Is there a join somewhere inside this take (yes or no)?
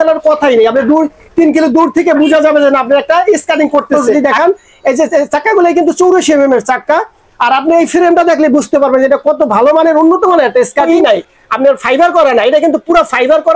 yes